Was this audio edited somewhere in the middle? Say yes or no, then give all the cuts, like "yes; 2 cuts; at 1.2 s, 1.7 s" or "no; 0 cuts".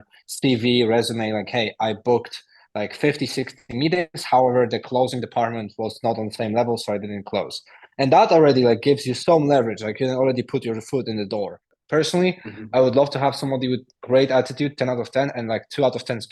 yes; 1 cut; at 11.7 s